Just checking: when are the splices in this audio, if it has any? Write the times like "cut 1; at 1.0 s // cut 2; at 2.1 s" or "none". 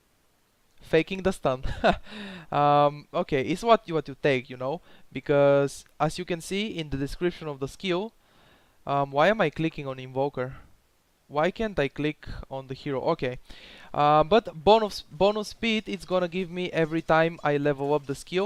none